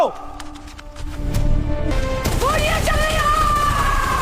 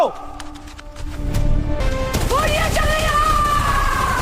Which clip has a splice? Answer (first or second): second